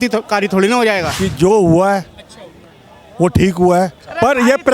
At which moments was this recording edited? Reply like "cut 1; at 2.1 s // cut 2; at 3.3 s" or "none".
cut 1; at 1.1 s